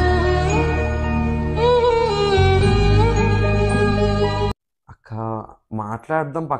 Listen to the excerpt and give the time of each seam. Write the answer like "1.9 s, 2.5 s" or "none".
none

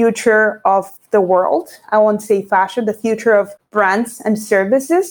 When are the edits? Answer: 1.0 s, 3.6 s

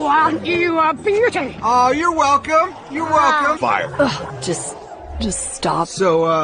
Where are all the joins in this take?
none

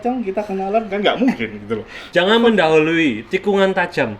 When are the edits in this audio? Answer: 1.9 s

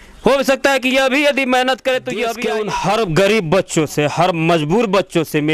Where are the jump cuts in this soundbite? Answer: 2.3 s

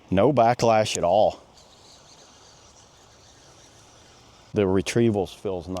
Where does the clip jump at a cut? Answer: 4.5 s

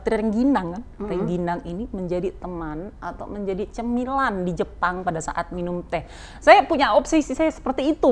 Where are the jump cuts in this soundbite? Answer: none

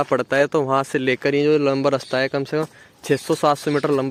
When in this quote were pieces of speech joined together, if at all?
none

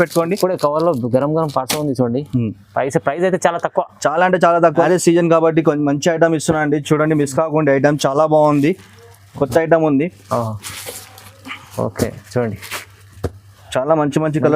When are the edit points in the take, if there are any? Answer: 4.8 s

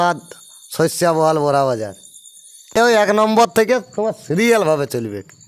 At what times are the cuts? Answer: 2.7 s

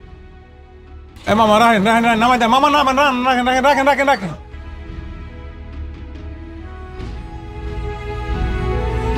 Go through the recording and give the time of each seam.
4.5 s

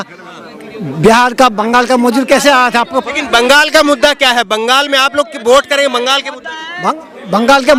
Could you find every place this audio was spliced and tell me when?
none

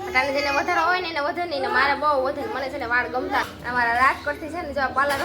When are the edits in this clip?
3.5 s

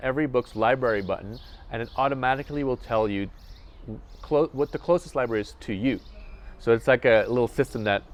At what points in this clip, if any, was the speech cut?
none

